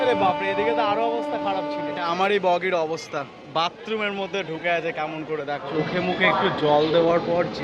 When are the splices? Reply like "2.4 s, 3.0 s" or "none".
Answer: 2.0 s, 5.7 s